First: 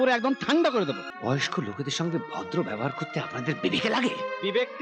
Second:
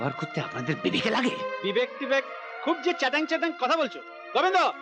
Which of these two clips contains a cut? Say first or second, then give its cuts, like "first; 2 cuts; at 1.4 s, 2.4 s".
first; 1 cut; at 1.1 s